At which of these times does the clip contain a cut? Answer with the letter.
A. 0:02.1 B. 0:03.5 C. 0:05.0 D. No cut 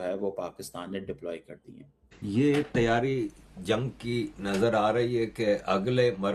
A